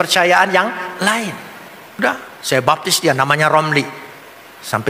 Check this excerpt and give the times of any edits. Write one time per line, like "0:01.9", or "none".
0:02.0